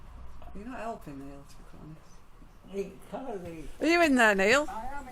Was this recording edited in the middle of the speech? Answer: yes; 1 cut; at 3.7 s

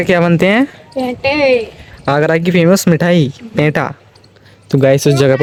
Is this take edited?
no; 0 cuts

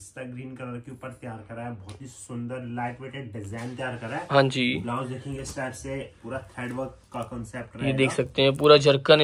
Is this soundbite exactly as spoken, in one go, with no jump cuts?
yes; 0 cuts

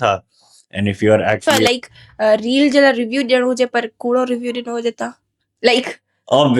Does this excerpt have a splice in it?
yes; 1 cut; at 1.4 s

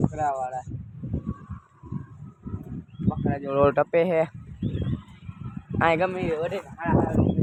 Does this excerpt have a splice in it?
no; 0 cuts

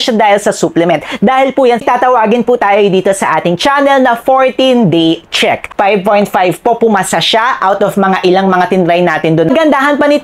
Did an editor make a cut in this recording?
yes; 3 cuts; at 1.8 s, 5.7 s, 9.5 s

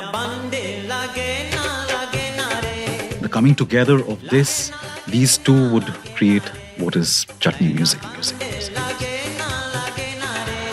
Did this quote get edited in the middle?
yes; 2 cuts; at 3.3 s, 8.0 s

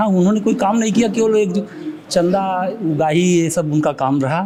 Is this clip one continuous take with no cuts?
yes; 0 cuts

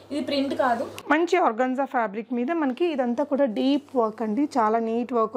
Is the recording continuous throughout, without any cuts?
no; 1 cut; at 0.9 s

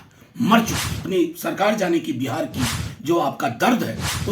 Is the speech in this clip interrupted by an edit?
yes; 1 cut; at 1.0 s

